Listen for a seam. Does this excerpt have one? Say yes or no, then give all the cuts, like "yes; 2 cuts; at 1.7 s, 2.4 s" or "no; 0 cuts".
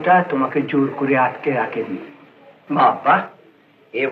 no; 0 cuts